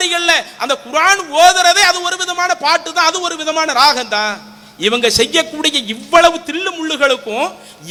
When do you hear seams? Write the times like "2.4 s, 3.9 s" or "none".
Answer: none